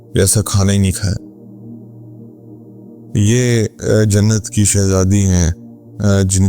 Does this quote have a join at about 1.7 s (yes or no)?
yes